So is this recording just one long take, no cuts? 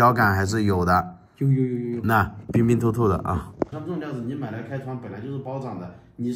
no; 2 cuts; at 2.4 s, 3.7 s

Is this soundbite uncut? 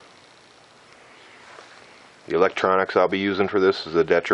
yes; 0 cuts

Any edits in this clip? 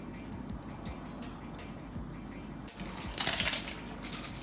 yes; 1 cut; at 2.7 s

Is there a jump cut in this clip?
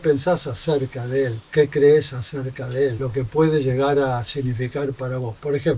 no; 0 cuts

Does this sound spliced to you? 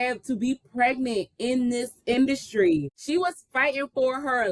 yes; 1 cut; at 3.0 s

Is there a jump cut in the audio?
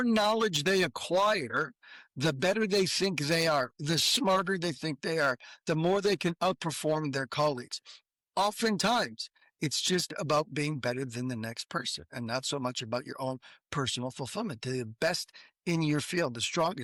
no; 0 cuts

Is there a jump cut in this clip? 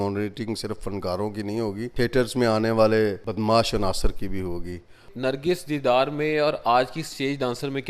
yes; 3 cuts; at 1.9 s, 3.2 s, 5.1 s

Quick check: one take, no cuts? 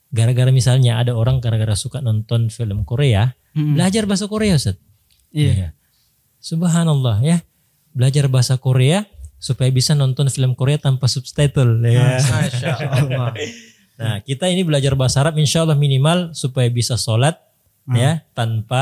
yes; 0 cuts

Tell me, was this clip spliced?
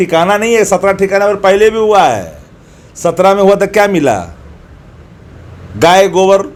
no; 0 cuts

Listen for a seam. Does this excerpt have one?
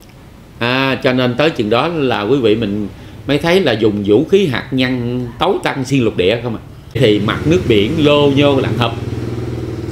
yes; 1 cut; at 7.0 s

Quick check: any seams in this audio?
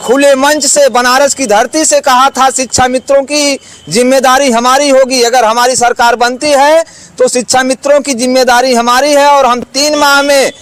no; 0 cuts

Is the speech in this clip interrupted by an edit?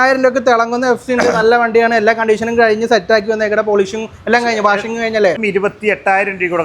yes; 1 cut; at 5.4 s

